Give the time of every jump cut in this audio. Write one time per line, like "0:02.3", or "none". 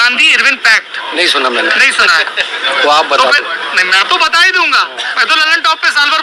0:01.9